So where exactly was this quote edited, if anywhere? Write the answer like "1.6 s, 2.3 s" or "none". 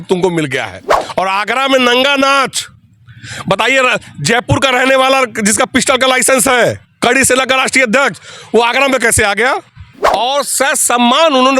1.0 s, 9.9 s